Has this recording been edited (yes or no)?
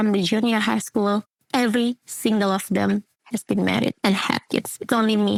no